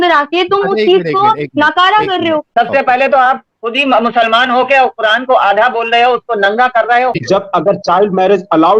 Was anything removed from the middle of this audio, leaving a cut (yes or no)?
yes